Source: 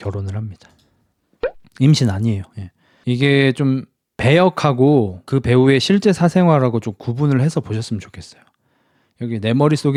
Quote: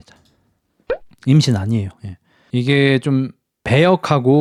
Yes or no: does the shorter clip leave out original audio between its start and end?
no